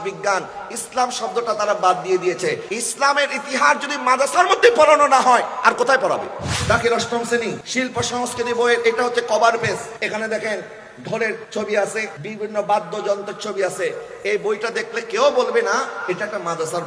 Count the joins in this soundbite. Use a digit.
6